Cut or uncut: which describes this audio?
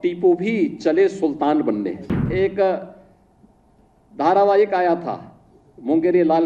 cut